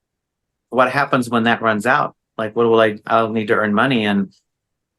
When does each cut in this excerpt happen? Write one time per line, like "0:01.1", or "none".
none